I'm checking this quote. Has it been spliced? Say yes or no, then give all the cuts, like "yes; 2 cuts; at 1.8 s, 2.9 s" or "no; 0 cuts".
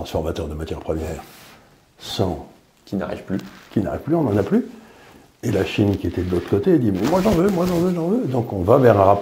no; 0 cuts